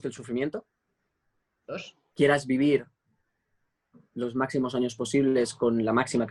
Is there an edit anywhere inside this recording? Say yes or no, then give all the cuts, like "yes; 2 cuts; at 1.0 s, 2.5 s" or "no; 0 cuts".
yes; 1 cut; at 2.0 s